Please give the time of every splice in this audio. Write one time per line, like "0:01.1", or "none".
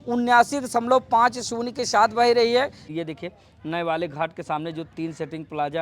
0:02.8